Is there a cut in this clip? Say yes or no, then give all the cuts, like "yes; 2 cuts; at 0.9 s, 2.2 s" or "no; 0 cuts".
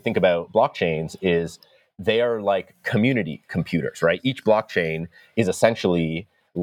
no; 0 cuts